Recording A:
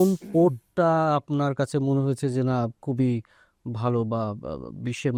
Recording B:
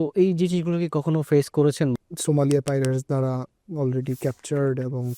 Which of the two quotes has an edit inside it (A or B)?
B